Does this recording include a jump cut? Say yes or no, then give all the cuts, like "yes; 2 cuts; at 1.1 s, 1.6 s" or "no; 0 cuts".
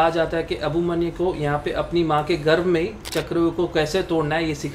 no; 0 cuts